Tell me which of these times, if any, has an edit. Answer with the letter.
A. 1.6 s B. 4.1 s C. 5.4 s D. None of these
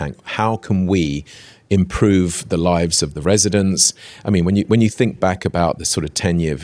D